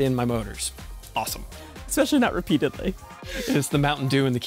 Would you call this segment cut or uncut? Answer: cut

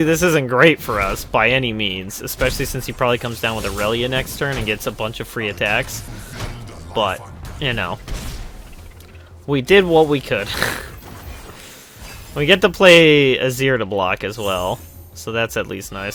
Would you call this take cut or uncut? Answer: uncut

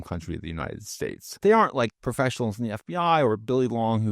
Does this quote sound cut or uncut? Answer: cut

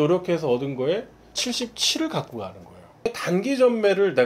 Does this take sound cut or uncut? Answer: cut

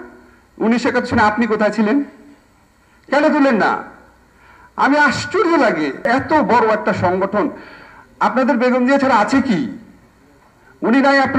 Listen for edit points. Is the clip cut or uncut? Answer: cut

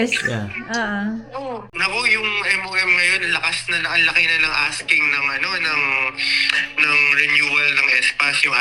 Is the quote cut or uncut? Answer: cut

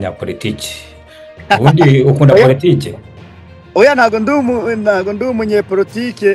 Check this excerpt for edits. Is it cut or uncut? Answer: uncut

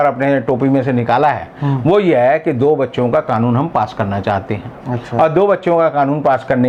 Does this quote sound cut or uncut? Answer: uncut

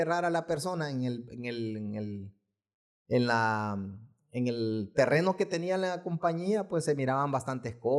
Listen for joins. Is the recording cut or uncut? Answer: uncut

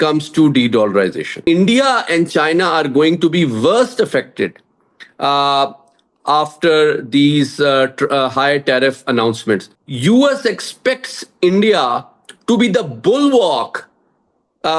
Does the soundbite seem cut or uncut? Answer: cut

